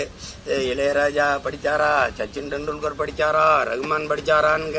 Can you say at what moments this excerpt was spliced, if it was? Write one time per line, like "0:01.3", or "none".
none